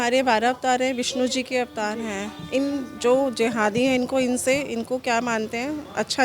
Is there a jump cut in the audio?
no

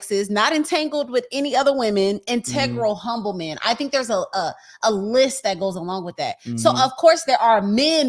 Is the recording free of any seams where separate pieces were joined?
yes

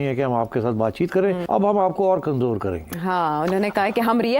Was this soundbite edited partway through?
yes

